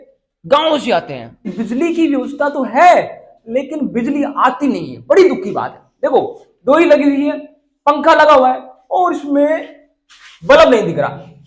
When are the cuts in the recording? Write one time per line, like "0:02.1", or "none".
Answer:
0:01.4